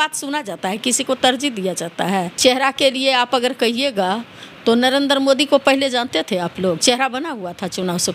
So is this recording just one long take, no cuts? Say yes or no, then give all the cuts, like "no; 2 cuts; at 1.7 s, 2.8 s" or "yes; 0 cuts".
no; 1 cut; at 2.3 s